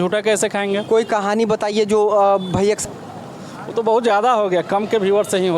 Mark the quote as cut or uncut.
cut